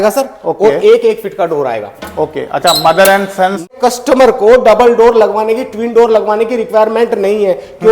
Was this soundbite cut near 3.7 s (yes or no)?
yes